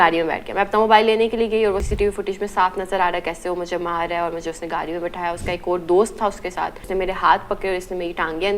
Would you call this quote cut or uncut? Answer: cut